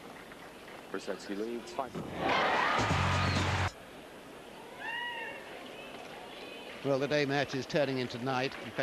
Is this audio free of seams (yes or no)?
no